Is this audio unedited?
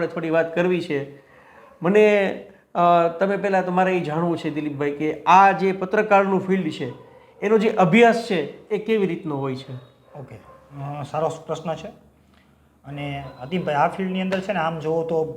yes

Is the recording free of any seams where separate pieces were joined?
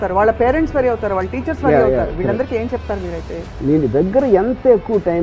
no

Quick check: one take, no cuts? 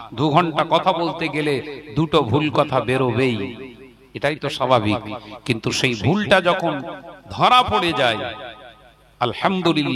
yes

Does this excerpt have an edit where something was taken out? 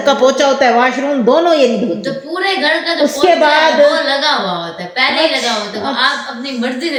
no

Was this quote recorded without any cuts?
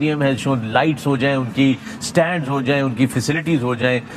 yes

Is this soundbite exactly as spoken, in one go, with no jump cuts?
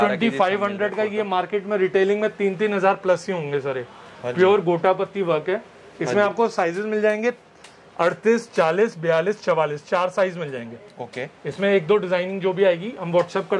yes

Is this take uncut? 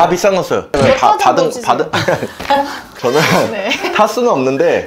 no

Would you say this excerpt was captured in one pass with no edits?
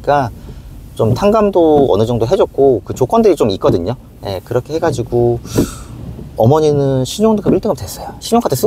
yes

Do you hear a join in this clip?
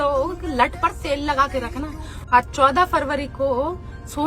yes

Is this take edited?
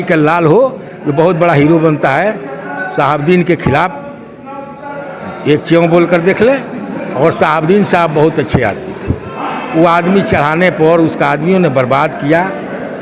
no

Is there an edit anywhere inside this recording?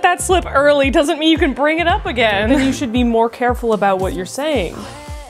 no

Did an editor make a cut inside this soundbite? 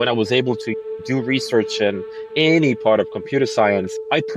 no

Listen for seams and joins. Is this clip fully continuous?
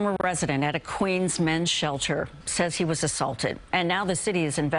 yes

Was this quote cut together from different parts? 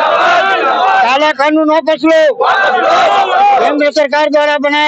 no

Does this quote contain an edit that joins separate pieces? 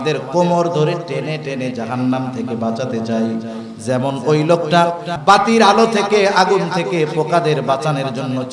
yes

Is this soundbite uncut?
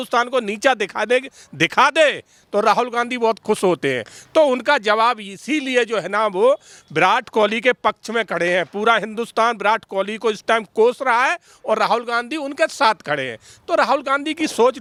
yes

